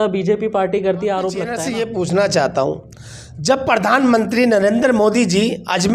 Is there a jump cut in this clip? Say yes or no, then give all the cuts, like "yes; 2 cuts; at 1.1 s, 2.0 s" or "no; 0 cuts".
yes; 1 cut; at 1.6 s